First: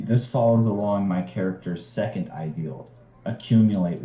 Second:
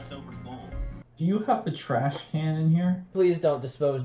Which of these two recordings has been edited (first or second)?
second